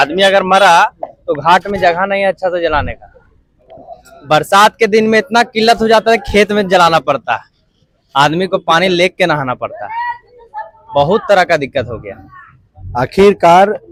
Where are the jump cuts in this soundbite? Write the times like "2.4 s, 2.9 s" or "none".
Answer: none